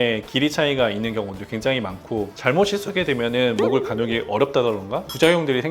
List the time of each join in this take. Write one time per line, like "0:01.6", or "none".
0:02.3